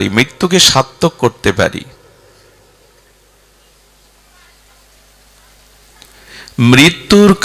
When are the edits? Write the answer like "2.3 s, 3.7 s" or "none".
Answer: none